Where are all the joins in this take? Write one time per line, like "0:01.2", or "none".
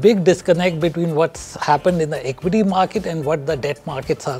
none